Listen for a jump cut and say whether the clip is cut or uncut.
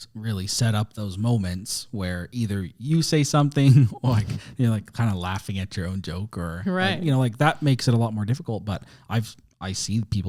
uncut